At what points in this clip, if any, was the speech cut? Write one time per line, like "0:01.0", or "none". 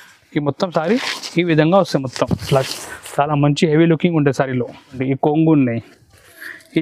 0:05.0